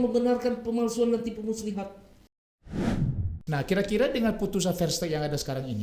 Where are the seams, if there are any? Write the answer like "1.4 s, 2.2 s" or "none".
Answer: 2.8 s